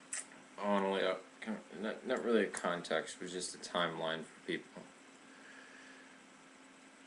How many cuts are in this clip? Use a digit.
1